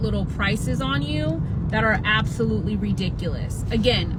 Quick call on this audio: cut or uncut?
uncut